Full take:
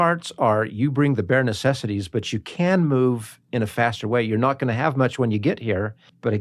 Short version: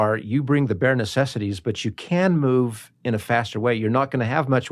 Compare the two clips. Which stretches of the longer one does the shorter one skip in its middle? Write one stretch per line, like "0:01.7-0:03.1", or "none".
none